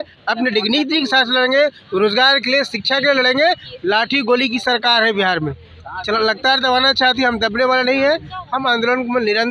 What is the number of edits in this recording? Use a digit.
0